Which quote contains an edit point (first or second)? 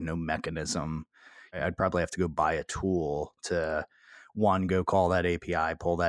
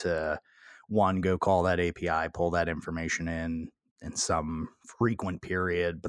first